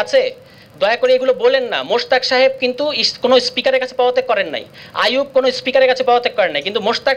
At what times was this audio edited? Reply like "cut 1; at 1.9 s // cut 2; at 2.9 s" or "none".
none